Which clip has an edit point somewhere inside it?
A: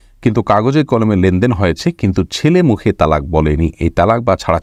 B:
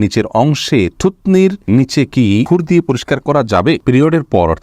B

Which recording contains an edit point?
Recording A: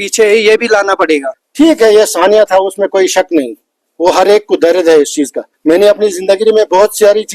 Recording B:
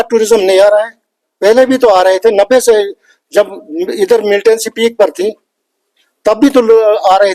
A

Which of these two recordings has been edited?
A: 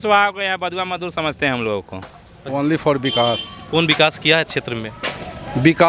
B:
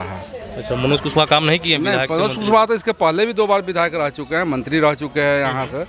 A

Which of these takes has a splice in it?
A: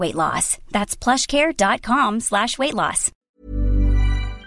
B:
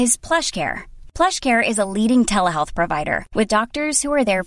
A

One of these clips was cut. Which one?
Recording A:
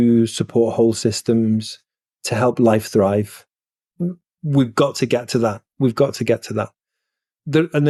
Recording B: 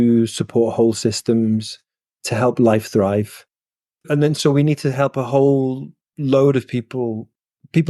B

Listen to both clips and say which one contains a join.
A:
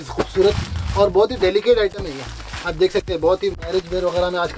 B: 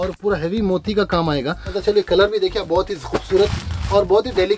B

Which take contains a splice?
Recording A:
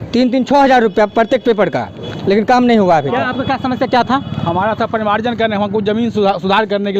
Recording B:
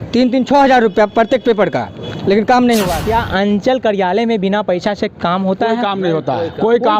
B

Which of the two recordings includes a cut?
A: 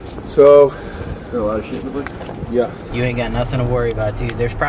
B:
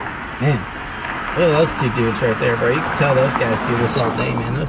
A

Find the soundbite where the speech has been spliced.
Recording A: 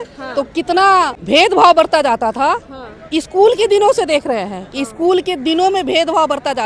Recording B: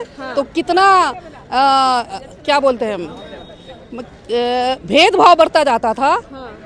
A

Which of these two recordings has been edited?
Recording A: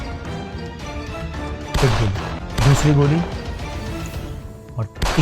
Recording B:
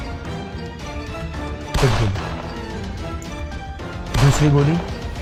A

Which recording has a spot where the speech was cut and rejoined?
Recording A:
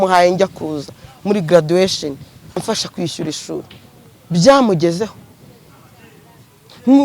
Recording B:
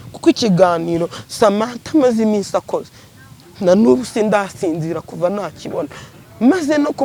A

